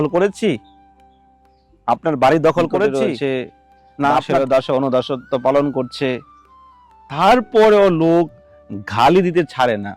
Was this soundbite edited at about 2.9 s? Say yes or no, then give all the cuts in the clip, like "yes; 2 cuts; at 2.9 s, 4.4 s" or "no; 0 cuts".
yes; 1 cut; at 2.9 s